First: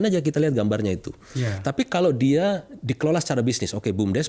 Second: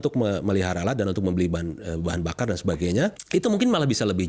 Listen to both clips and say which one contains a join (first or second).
second